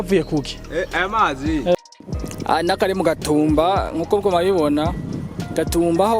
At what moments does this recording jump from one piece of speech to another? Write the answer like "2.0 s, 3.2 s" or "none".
1.8 s